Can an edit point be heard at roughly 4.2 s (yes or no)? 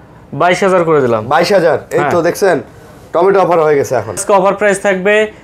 yes